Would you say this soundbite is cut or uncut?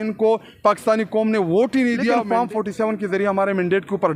cut